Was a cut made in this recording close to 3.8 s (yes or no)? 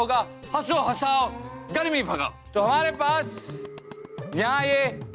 no